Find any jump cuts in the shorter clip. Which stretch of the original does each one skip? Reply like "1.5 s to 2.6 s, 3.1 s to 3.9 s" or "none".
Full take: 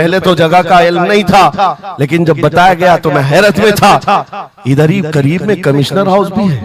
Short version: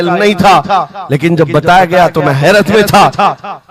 none